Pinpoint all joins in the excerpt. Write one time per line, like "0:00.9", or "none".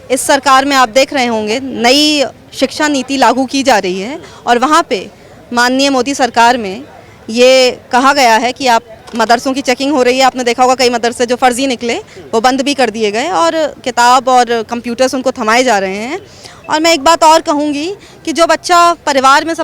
none